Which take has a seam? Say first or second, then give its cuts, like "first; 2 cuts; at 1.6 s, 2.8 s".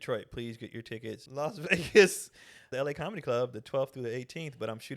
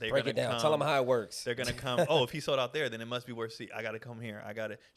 first; 2 cuts; at 1.3 s, 2.7 s